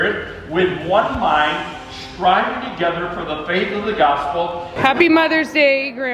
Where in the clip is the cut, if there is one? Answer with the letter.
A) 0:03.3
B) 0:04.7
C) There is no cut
B